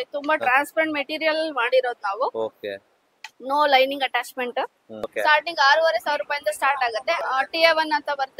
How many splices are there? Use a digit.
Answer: 2